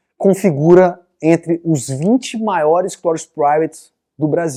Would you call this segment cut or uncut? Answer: uncut